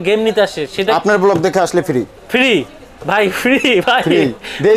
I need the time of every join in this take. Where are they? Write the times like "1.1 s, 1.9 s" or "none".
none